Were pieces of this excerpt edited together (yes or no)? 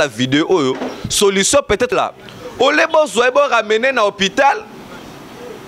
yes